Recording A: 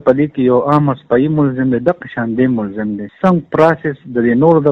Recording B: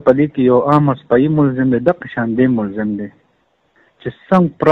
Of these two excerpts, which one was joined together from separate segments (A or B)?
A